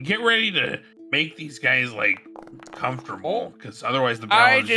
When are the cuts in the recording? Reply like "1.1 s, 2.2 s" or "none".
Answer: 0.9 s